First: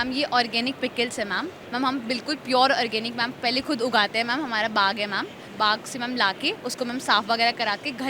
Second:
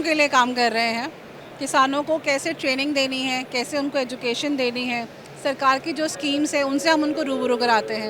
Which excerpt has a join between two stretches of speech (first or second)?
first